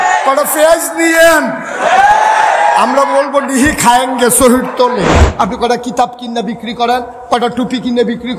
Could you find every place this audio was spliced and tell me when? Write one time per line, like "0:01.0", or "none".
0:05.1